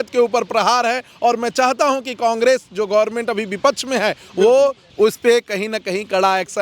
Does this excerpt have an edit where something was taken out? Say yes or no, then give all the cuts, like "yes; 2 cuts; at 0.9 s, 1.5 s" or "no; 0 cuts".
yes; 1 cut; at 4.8 s